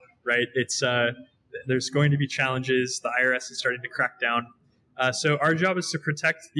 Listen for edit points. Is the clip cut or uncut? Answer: uncut